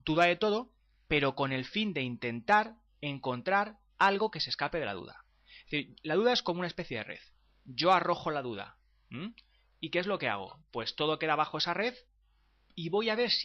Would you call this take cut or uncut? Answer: uncut